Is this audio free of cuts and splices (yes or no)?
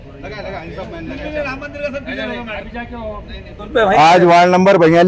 no